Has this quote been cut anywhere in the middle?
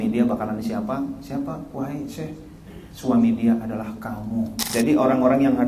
yes; 1 cut; at 4.6 s

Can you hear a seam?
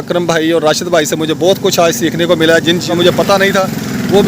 yes; 1 cut; at 2.9 s

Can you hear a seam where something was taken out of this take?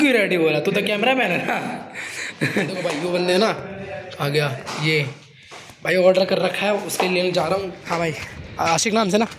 yes; 2 cuts; at 2.8 s, 7.8 s

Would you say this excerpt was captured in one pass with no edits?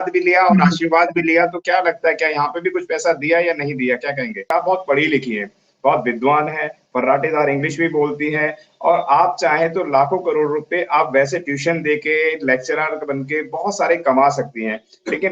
no; 1 cut; at 4.5 s

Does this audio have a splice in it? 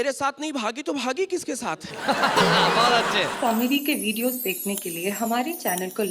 yes; 1 cut; at 3.3 s

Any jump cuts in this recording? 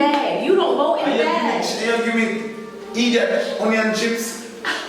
no; 0 cuts

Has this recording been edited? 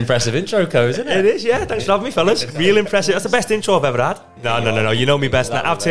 yes; 1 cut; at 4.3 s

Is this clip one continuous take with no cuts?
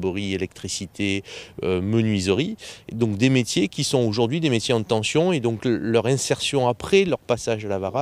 no; 1 cut; at 4.1 s

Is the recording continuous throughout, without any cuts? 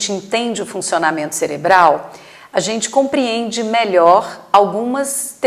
yes; 0 cuts

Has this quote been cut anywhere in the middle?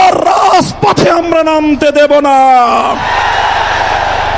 no; 0 cuts

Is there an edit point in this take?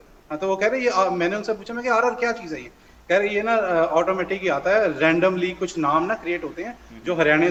no; 0 cuts

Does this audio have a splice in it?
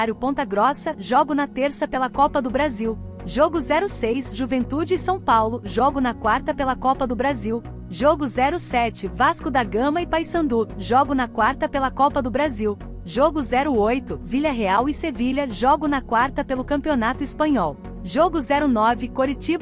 yes; 4 cuts; at 3.1 s, 7.7 s, 12.9 s, 17.9 s

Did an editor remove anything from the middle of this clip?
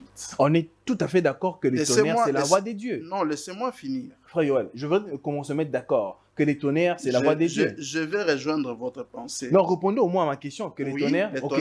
no; 0 cuts

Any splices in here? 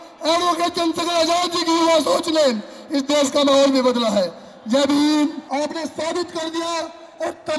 yes; 1 cut; at 5.4 s

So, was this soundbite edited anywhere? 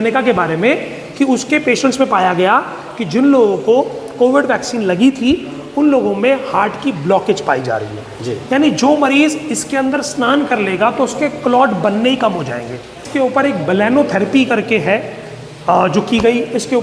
yes; 1 cut; at 13.0 s

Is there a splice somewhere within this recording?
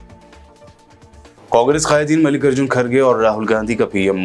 no; 0 cuts

